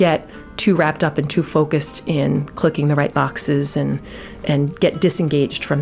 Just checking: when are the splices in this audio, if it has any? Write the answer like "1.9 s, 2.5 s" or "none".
none